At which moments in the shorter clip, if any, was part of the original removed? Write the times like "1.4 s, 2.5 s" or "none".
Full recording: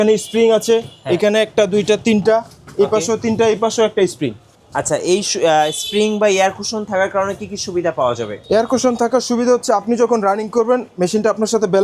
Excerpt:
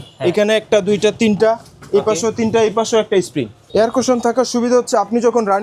3.6 s

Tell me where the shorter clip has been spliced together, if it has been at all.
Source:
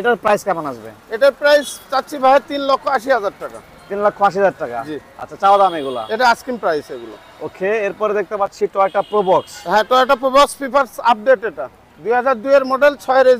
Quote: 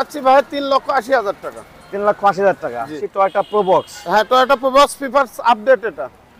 3.0 s

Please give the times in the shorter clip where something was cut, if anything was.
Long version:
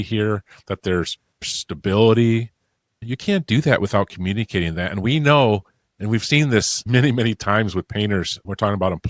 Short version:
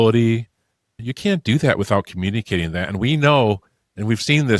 none

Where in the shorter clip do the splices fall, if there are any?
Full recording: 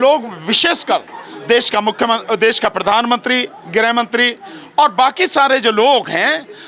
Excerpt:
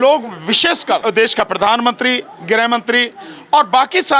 1.0 s

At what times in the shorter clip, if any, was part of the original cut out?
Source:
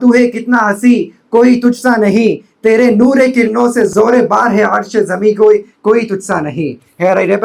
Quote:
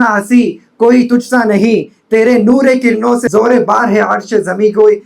3.3 s

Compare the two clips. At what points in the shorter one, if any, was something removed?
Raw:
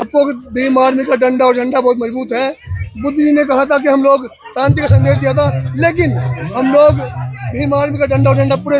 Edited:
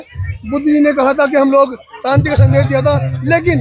none

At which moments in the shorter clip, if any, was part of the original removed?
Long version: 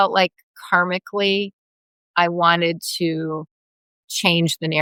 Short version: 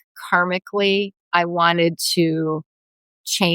1.2 s

